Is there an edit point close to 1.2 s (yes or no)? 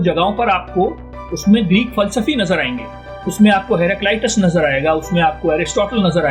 no